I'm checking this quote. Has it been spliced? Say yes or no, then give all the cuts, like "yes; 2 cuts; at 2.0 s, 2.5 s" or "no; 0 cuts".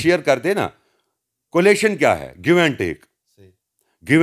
no; 0 cuts